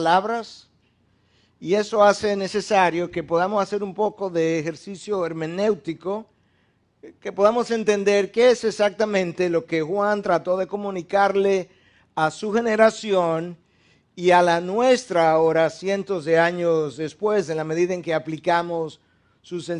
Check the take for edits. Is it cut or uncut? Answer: uncut